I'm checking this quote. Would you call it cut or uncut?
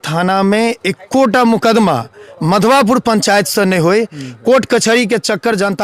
uncut